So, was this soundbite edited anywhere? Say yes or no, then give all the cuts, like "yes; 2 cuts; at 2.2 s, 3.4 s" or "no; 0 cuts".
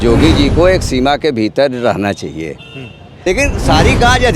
yes; 1 cut; at 3.1 s